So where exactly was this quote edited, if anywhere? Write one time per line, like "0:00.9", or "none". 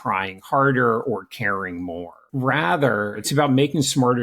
0:02.2
0:03.2

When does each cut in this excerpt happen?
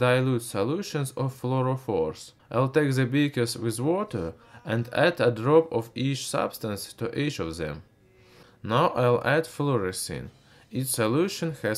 0:06.3

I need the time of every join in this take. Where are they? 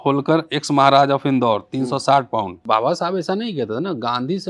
0:02.6

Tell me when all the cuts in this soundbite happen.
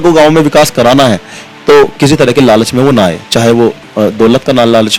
none

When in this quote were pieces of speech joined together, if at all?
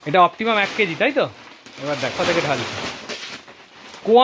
0:02.1

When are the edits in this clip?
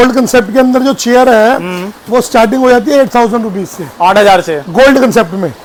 none

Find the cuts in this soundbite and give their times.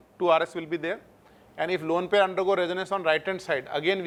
none

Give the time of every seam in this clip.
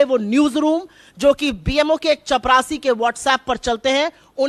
none

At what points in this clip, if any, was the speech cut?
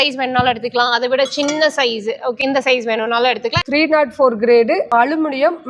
0:02.4
0:03.6
0:04.8

